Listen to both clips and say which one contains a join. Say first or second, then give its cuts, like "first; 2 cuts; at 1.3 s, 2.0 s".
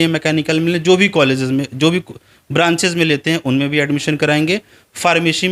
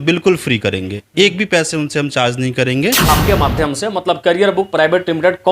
second; 1 cut; at 3.0 s